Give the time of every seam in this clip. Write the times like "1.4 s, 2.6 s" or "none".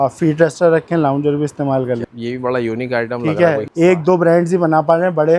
2.1 s, 3.6 s